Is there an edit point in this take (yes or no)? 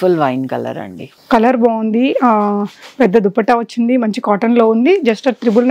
no